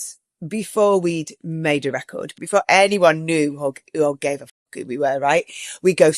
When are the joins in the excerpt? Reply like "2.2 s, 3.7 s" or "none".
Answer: 2.3 s